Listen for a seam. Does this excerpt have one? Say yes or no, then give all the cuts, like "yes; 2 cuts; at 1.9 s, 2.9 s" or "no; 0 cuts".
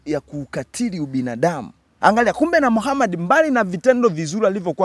yes; 1 cut; at 1.8 s